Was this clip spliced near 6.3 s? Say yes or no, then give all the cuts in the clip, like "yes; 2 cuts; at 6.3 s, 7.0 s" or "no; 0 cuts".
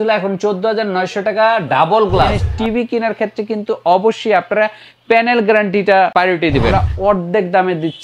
yes; 2 cuts; at 2.4 s, 6.3 s